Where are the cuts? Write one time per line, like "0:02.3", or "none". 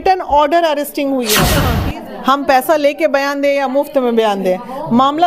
0:01.7